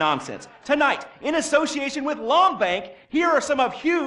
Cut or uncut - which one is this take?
uncut